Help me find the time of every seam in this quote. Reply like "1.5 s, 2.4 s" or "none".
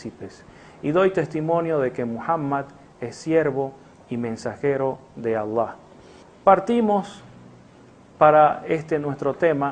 none